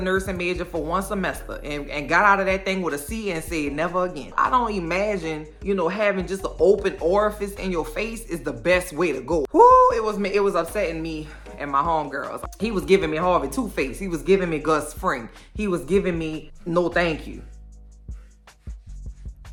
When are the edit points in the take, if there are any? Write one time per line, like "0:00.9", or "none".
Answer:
none